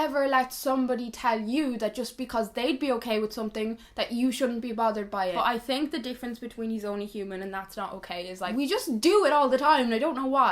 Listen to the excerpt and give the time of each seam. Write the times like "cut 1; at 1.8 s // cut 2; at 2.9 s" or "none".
cut 1; at 5.3 s // cut 2; at 8.5 s

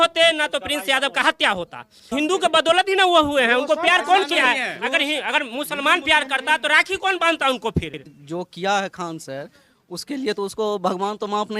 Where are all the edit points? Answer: cut 1; at 2.1 s // cut 2; at 8.2 s

